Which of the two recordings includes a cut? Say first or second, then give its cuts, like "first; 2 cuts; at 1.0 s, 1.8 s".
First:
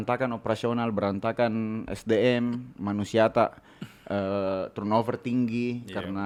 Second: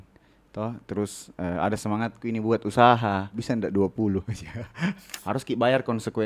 second; 2 cuts; at 3.3 s, 5.1 s